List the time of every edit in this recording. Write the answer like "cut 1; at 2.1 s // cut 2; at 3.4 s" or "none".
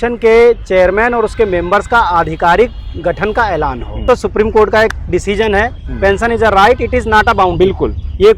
cut 1; at 4.0 s